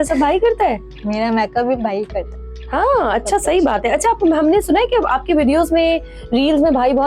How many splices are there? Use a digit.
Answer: 0